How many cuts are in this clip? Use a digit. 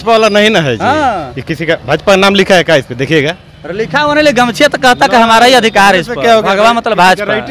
0